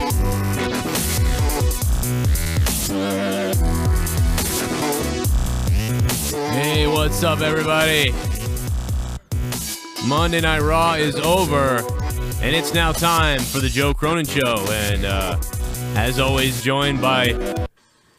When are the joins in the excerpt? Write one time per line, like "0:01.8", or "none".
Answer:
0:00.9

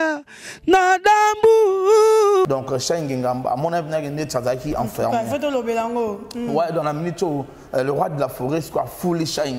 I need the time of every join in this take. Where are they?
0:02.5

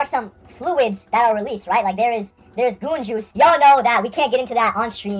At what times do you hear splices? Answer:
0:03.3

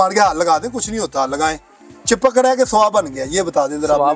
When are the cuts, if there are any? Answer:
none

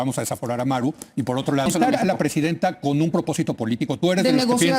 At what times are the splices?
0:01.7

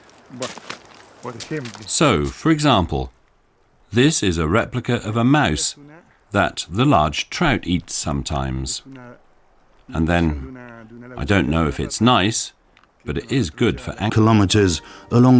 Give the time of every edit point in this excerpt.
none

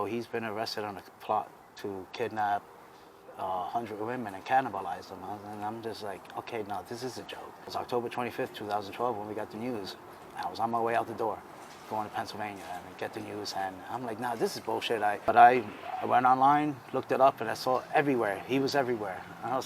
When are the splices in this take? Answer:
0:07.7
0:15.3

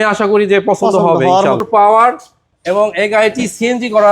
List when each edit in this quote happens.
0:01.6

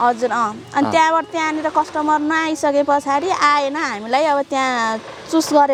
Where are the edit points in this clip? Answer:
none

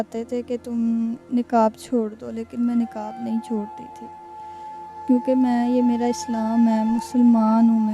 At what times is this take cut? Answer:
none

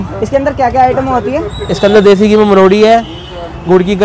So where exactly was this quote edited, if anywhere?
none

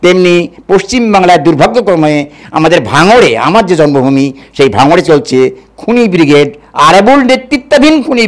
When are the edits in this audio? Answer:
none

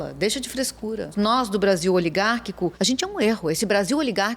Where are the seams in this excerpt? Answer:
0:01.1
0:02.8

